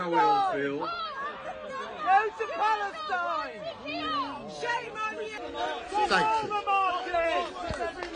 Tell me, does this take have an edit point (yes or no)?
yes